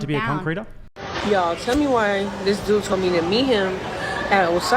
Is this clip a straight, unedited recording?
no; 1 cut; at 1.0 s

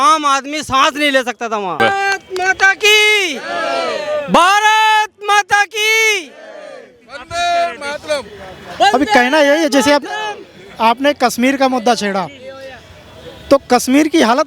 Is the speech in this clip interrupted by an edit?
yes; 1 cut; at 1.8 s

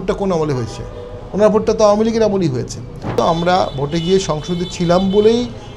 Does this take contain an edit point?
yes; 1 cut; at 3.2 s

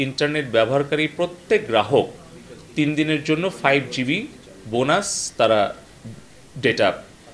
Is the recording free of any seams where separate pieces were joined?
yes; 0 cuts

